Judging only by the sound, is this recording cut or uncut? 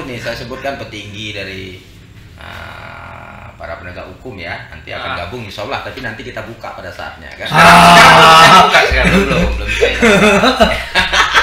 uncut